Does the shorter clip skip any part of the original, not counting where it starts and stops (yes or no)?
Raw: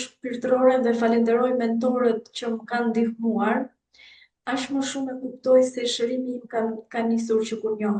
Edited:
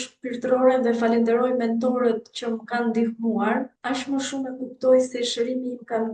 yes